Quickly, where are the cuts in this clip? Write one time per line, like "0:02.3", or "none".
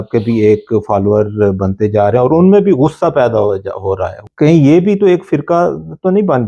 0:04.2